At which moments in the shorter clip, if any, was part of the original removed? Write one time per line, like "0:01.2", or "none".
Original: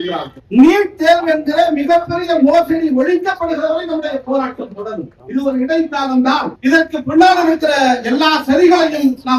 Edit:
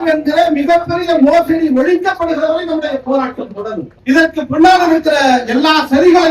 0:04.0

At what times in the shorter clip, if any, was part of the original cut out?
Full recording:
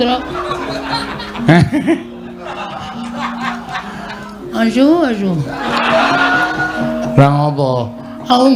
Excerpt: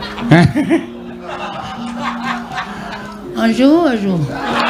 none

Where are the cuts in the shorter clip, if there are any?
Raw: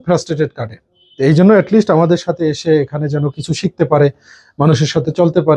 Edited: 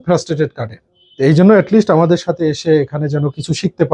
none

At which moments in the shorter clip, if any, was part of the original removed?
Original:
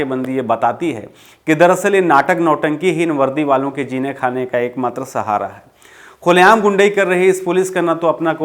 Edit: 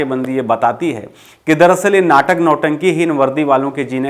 none

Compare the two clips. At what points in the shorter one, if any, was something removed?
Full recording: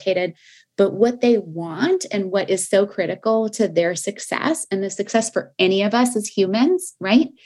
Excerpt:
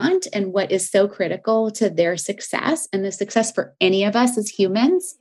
none

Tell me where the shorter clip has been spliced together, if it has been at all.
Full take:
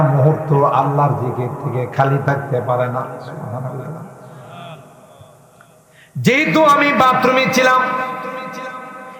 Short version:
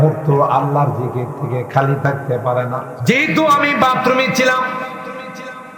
0:02.9

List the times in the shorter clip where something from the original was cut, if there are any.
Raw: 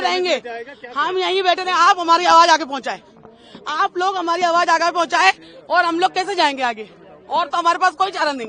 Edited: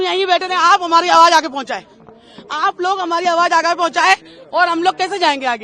none

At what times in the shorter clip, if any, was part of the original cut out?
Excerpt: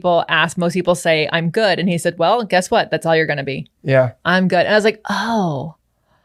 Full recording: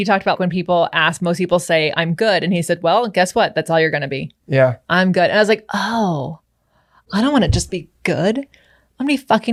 none

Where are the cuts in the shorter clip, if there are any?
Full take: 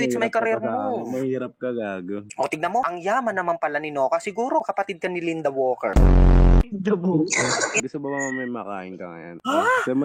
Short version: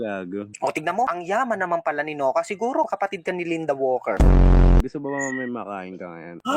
0:04.8

